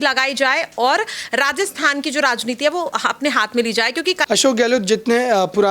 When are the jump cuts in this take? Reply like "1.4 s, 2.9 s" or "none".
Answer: 4.2 s

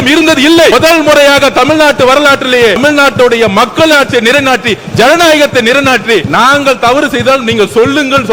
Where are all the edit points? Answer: 0.7 s, 2.8 s, 6.3 s

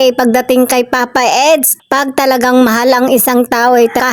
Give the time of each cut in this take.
none

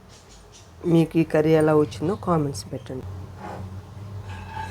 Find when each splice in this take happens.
3.0 s

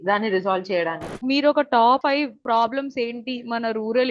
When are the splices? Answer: 1.1 s, 2.2 s

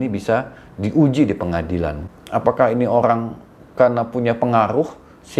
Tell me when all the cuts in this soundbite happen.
2.0 s

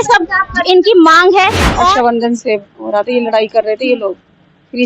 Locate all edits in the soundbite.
1.6 s

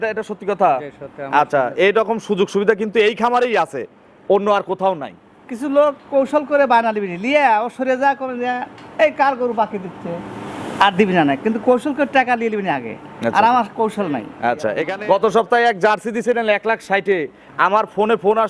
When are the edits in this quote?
14.8 s

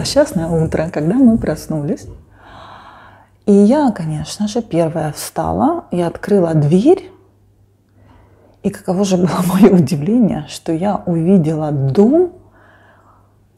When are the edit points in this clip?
none

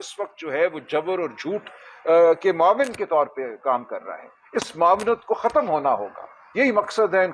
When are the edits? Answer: none

